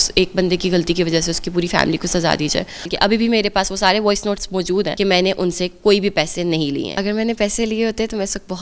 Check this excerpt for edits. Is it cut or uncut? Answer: cut